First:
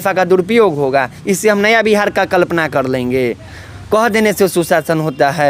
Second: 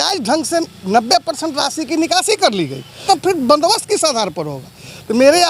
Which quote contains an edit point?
second; 1 cut; at 3.0 s

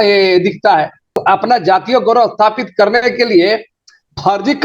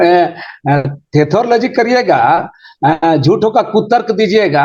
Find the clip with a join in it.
first; 1 cut; at 1.2 s

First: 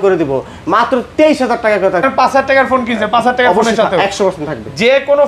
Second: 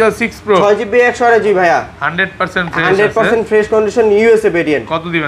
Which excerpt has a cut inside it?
first; 1 cut; at 2.1 s

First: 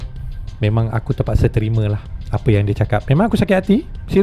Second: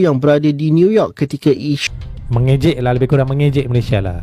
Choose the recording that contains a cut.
second; 1 cut; at 1.8 s

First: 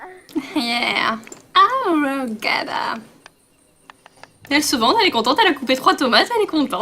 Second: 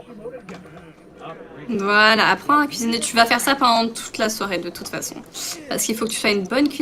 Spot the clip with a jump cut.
first; 1 cut; at 5.1 s

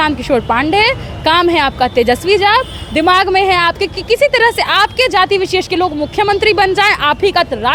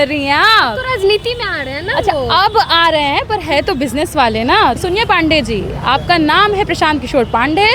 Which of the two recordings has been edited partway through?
second; 1 cut; at 4.8 s

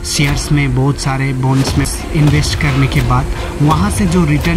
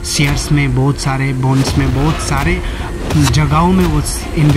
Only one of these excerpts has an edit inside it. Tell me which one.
first; 1 cut; at 1.9 s

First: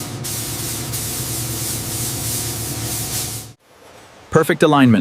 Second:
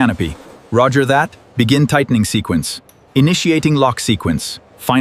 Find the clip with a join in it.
first; 1 cut; at 3.6 s

